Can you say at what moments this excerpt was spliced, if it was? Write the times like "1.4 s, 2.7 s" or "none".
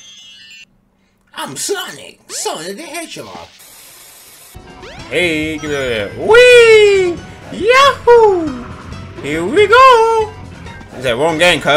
4.6 s